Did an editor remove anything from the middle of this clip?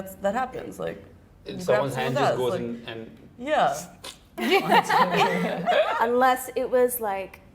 yes; 1 cut; at 5.9 s

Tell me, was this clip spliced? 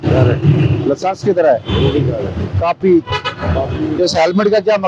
no; 0 cuts

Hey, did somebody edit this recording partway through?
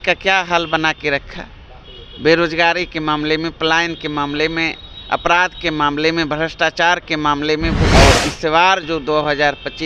yes; 1 cut; at 7.9 s

